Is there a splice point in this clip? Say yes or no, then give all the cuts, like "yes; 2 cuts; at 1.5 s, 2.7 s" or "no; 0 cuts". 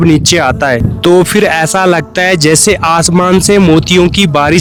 no; 0 cuts